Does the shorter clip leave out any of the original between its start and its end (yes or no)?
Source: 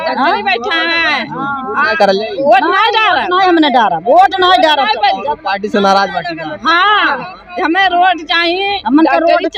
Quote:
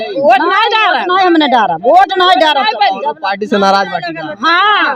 no